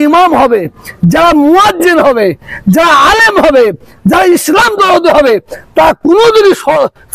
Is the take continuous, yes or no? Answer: yes